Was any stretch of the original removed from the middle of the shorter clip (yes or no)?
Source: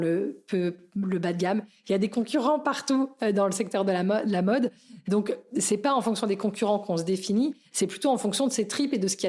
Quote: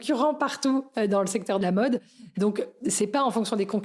yes